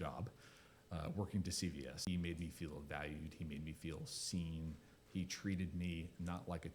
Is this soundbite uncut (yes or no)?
no